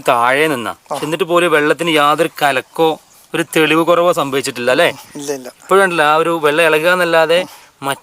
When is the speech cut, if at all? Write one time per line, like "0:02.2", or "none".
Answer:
none

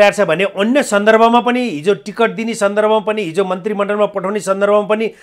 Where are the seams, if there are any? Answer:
none

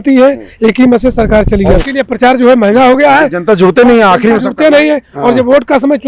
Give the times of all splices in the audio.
0:01.8

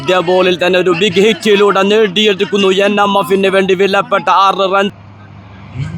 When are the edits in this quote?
0:05.0

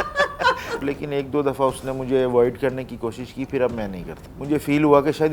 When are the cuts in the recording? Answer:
0:00.8
0:04.3

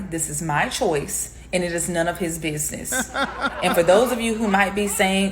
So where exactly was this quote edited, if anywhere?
0:02.9

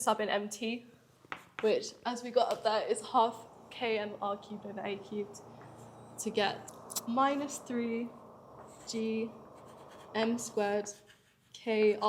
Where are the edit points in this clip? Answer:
none

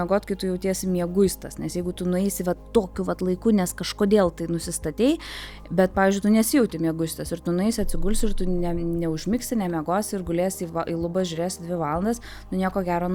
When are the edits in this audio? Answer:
none

